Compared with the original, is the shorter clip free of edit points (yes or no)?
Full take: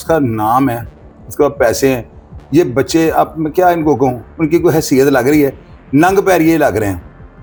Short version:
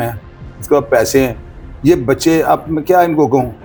yes